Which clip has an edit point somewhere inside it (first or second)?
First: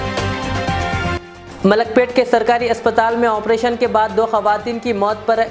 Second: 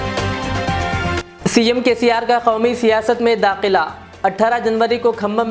second